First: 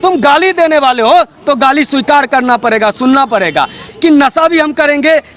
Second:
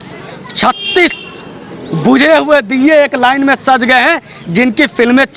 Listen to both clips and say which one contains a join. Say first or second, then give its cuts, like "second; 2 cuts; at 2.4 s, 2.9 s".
first; 1 cut; at 3.9 s